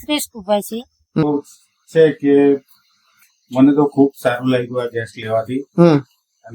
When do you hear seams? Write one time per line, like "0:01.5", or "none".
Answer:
0:01.2